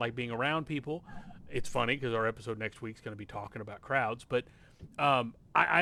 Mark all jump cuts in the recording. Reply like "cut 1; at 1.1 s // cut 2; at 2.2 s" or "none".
none